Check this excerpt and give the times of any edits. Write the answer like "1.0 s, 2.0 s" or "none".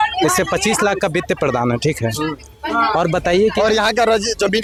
none